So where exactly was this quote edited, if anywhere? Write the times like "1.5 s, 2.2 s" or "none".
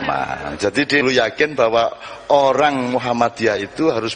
1.0 s